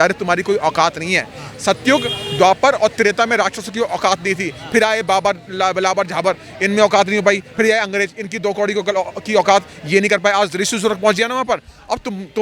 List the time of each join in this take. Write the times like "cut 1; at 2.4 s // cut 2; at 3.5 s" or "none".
none